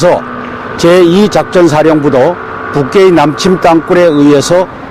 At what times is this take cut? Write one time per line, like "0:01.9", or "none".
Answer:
0:03.2